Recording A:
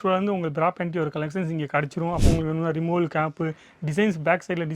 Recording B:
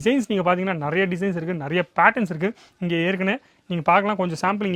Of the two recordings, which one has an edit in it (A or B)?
A